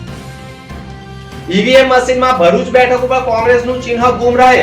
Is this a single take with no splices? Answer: no; 1 cut; at 1.4 s

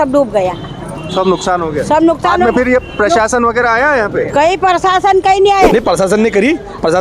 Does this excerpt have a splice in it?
yes; 1 cut; at 5.7 s

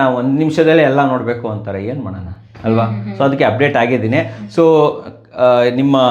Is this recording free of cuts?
yes; 0 cuts

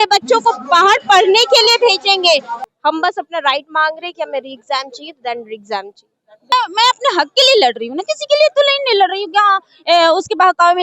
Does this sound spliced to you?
yes; 2 cuts; at 2.6 s, 6.5 s

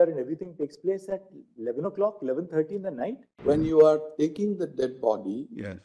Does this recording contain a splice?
yes; 1 cut; at 3.3 s

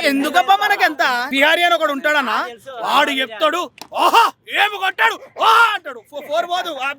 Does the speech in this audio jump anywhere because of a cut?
yes; 1 cut; at 1.2 s

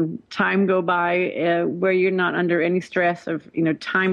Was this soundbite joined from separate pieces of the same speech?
no; 0 cuts

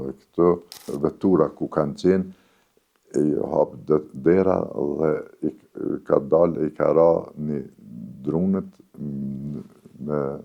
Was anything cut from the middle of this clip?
yes; 1 cut; at 0.9 s

